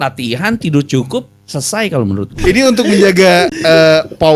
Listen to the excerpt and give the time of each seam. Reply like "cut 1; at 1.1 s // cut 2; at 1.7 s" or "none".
cut 1; at 2.3 s

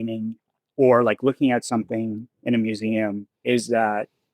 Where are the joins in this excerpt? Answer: cut 1; at 3.3 s

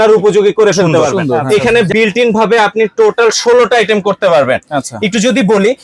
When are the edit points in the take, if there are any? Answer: cut 1; at 1.4 s

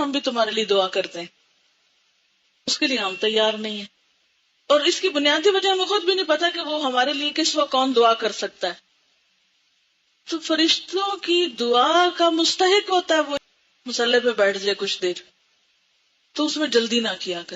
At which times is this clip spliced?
cut 1; at 13.4 s

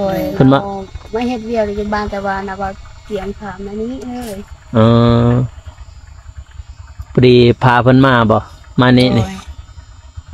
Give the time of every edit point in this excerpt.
none

